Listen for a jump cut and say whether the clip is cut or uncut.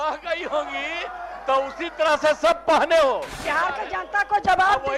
cut